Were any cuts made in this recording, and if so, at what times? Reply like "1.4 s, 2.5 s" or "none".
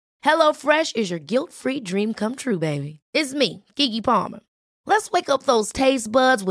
none